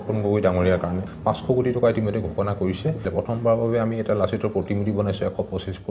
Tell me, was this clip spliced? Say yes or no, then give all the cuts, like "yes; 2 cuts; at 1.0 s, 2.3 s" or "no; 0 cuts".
yes; 2 cuts; at 1.1 s, 3.1 s